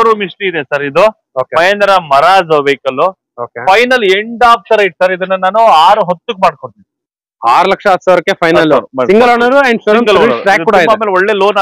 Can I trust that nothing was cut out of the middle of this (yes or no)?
yes